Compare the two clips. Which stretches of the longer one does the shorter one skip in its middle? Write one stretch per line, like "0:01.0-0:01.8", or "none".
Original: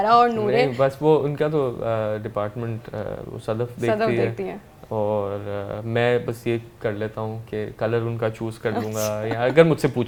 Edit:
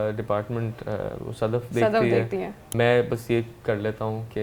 0:04.7-0:05.8